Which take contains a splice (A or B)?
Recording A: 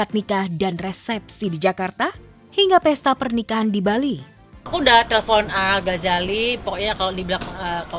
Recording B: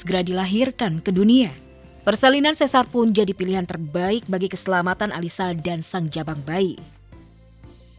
B